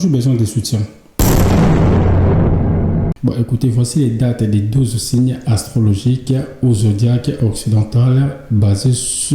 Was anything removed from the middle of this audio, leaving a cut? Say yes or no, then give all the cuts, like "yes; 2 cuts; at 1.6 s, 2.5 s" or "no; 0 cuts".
yes; 2 cuts; at 1.2 s, 3.2 s